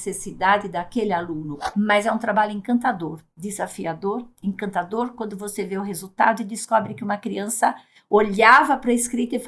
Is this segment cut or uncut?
cut